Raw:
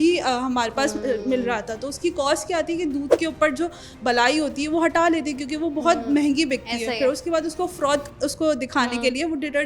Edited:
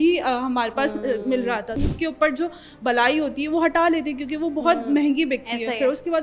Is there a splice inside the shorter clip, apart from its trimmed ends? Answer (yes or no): yes